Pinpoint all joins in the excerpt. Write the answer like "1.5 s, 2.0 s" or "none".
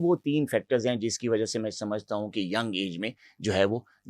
none